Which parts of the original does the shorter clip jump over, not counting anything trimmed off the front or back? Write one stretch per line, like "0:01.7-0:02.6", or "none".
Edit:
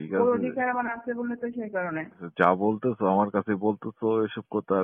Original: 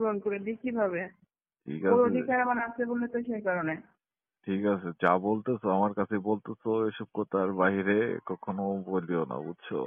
0:04.0-0:04.9